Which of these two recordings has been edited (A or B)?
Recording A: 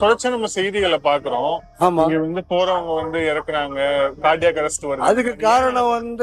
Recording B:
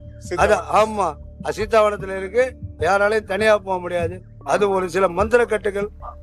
B